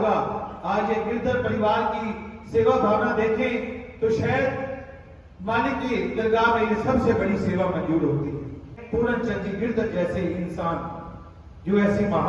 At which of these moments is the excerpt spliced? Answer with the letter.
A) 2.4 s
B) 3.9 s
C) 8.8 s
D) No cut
C